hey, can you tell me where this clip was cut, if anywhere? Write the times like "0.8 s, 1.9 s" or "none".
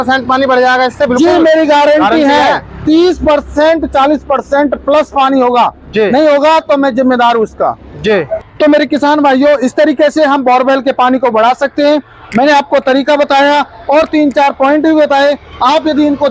8.4 s